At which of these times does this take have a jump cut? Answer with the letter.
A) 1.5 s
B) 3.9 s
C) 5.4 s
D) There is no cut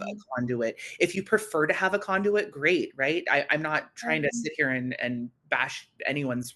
C